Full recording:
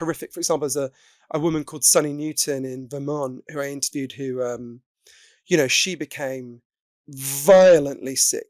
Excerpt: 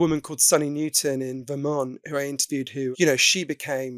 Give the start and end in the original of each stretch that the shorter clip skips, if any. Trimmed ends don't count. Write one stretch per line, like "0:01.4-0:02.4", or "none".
0:04.4-0:05.4